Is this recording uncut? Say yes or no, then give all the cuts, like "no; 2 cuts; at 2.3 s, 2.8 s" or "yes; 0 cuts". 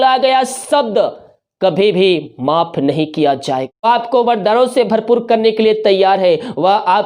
no; 1 cut; at 3.8 s